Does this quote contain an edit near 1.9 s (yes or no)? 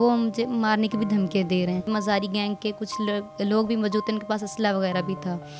yes